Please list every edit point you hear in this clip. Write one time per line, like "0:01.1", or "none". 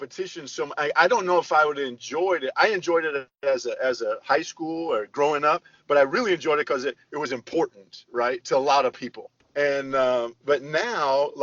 0:09.4